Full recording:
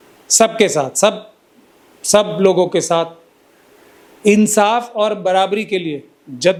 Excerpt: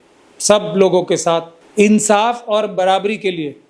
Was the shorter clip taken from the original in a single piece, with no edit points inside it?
no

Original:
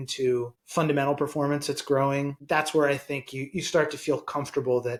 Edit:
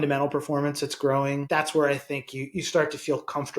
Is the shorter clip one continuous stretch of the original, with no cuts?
no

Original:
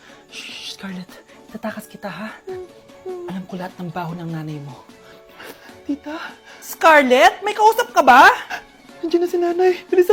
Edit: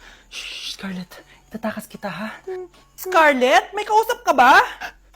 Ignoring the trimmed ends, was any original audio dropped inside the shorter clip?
yes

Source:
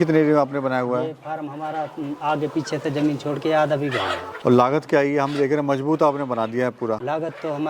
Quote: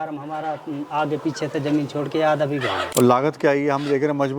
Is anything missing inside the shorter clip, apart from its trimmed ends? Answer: yes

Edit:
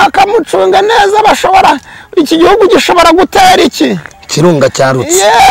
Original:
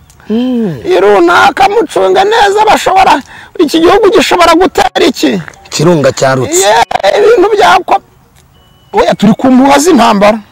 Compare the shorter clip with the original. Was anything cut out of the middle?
no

